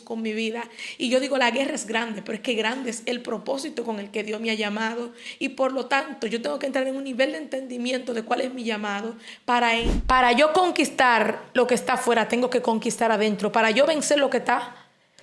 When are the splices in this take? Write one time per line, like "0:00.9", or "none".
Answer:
0:09.9